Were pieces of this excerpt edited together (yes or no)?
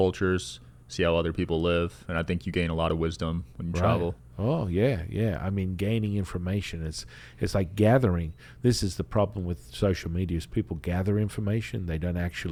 no